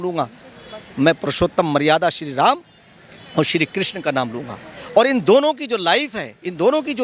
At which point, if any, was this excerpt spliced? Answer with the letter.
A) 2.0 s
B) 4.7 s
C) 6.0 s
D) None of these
D